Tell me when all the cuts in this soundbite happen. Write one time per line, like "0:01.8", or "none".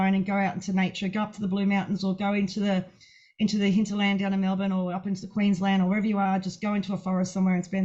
none